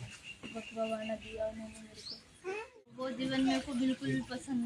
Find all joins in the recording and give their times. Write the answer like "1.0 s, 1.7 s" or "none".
3.1 s

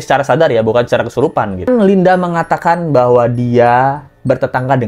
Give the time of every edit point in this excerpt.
1.7 s

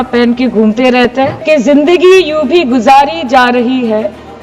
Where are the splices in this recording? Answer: 1.4 s

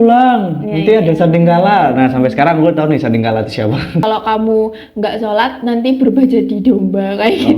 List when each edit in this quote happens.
4.0 s

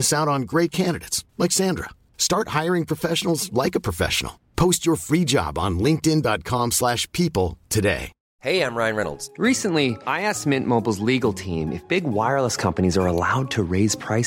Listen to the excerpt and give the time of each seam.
8.1 s

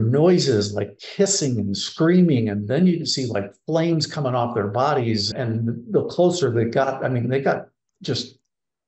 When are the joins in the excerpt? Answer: 1.0 s, 5.3 s

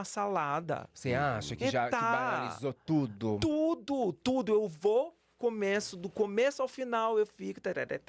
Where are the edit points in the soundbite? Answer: none

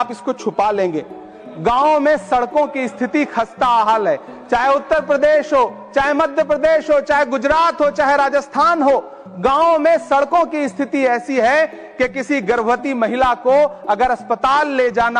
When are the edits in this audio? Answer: none

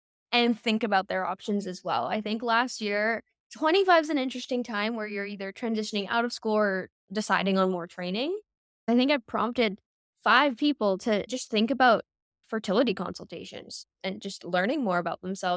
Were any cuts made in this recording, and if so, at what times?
8.8 s, 11.4 s

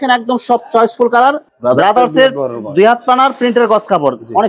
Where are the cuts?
1.5 s

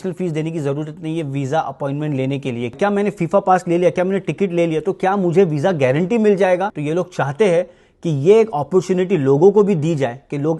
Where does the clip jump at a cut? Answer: 2.7 s, 6.8 s

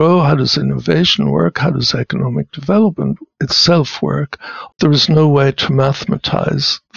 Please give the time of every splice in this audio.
4.7 s

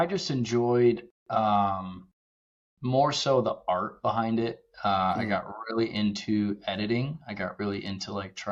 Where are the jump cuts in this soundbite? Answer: none

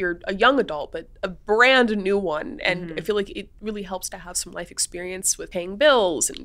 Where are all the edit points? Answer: 5.5 s

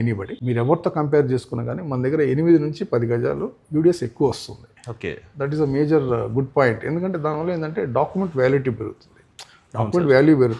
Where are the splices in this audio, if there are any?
none

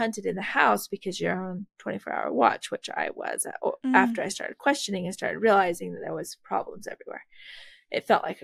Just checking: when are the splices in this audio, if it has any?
none

